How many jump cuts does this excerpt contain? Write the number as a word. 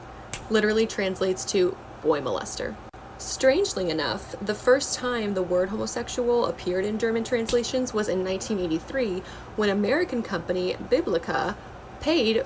one